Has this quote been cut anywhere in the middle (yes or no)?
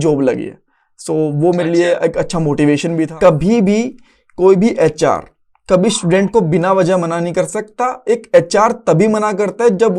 yes